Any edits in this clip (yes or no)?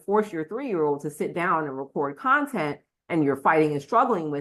no